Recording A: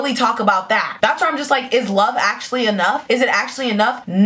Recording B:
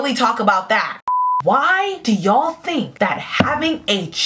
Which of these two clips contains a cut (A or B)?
B